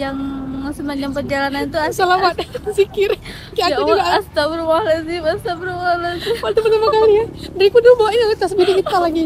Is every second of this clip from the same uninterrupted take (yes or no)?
yes